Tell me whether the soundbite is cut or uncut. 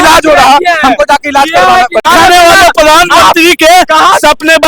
cut